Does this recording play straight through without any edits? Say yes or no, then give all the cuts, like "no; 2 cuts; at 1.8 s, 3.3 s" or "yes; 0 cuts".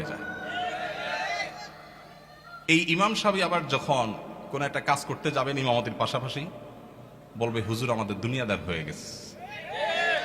yes; 0 cuts